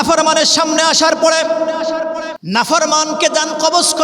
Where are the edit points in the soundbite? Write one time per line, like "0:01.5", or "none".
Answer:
0:02.3